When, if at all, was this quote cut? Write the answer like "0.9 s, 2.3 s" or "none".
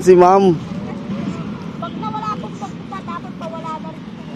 none